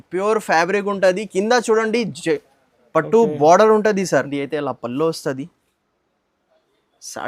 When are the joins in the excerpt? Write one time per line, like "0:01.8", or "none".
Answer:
0:04.4